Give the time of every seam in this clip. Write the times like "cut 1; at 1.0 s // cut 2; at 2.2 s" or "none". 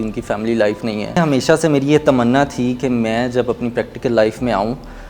cut 1; at 1.2 s